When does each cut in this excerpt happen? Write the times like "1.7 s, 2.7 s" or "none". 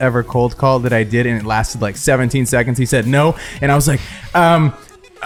none